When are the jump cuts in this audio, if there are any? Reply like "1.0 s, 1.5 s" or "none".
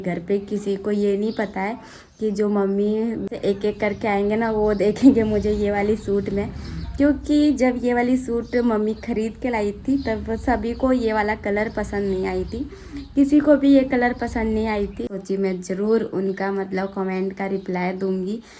3.3 s, 15.1 s